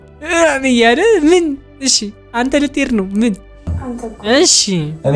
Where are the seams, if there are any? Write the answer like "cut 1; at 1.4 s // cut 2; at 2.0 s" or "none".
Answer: cut 1; at 3.6 s